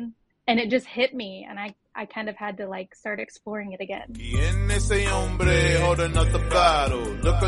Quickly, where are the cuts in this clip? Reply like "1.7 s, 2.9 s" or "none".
4.6 s